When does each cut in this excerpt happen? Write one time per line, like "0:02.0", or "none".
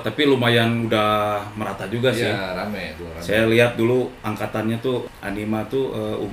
0:05.1